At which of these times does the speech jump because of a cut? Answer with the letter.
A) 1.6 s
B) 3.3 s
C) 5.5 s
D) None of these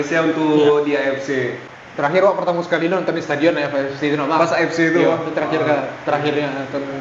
A